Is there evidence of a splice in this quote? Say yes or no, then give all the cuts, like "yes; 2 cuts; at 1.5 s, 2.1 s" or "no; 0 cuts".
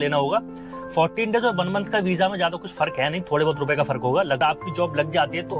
yes; 1 cut; at 4.4 s